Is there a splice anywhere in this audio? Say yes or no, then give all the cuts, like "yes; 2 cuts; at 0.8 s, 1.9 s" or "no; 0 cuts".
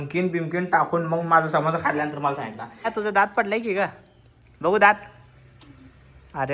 yes; 1 cut; at 2.9 s